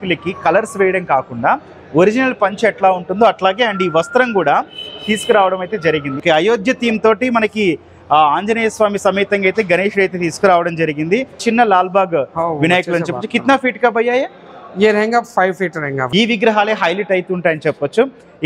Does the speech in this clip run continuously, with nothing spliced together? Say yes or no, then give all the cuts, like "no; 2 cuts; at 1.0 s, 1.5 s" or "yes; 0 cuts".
no; 3 cuts; at 6.2 s, 11.4 s, 16.0 s